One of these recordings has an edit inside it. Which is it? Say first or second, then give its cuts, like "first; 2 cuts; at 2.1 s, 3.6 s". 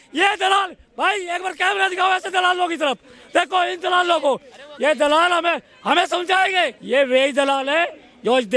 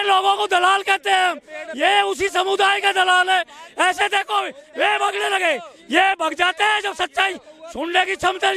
first; 1 cut; at 6.8 s